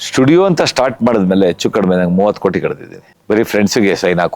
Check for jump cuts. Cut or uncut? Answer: uncut